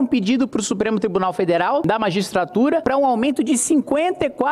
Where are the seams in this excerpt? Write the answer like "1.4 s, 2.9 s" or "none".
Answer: 1.8 s, 2.8 s